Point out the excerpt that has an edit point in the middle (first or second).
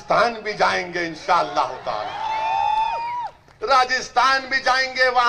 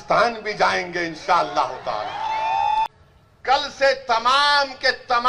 second